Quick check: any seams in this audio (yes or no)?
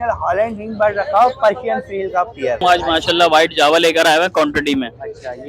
yes